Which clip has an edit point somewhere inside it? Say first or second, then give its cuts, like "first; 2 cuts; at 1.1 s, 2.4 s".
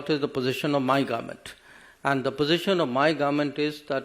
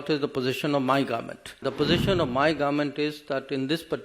second; 1 cut; at 1.6 s